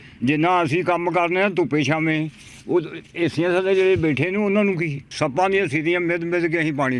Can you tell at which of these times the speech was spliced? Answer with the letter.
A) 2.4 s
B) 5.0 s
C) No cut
B